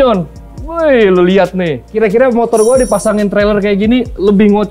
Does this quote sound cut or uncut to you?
cut